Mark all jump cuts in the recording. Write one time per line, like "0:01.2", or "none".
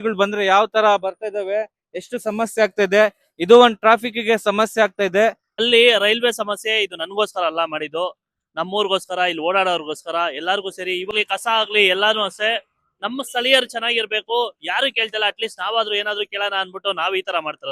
0:05.6
0:11.1